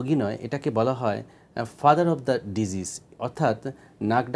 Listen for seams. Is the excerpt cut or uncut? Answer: uncut